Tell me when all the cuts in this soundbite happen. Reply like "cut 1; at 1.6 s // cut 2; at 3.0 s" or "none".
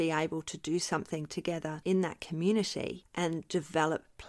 cut 1; at 1.8 s // cut 2; at 3.0 s